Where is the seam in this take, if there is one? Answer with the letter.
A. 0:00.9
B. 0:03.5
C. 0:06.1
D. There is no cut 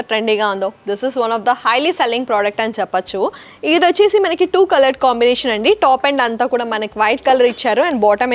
B